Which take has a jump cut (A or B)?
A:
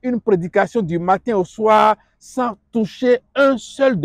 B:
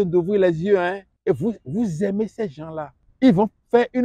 B